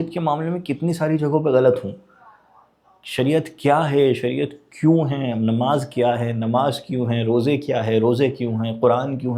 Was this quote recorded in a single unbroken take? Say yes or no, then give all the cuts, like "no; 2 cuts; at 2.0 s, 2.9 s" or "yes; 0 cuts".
yes; 0 cuts